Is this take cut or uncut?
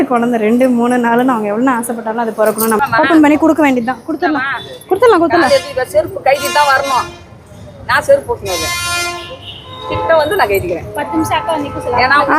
cut